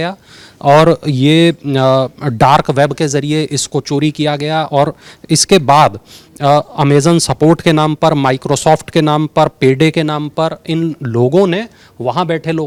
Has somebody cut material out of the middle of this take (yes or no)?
no